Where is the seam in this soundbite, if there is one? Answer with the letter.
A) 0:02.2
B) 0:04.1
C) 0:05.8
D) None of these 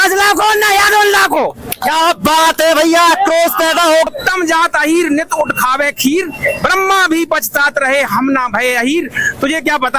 B